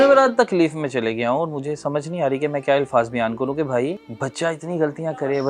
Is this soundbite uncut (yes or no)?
no